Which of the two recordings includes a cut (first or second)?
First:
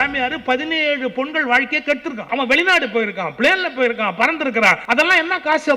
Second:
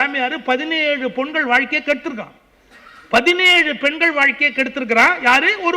first